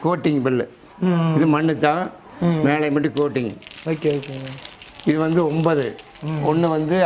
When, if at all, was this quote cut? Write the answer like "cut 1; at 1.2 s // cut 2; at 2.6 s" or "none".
none